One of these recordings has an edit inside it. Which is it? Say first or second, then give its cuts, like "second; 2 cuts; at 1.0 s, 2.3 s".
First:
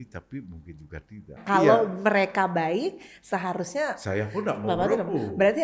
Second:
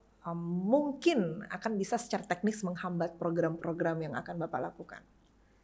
first; 1 cut; at 1.4 s